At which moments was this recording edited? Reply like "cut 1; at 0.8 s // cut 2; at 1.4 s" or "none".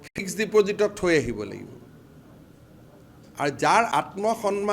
cut 1; at 1.1 s